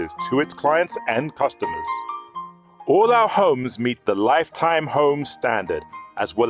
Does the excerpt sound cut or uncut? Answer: uncut